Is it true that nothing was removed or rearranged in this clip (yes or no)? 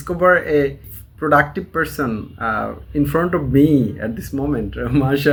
yes